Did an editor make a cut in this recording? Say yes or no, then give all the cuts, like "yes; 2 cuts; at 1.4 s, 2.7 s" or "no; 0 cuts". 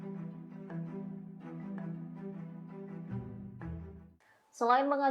yes; 1 cut; at 4.1 s